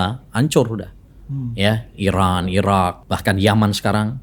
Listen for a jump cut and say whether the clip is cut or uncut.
cut